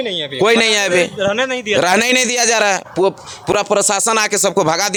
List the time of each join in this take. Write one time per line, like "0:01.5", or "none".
none